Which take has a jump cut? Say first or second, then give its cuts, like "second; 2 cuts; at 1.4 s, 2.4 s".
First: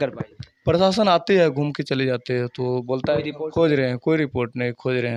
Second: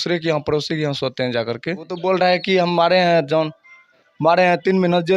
second; 1 cut; at 1.9 s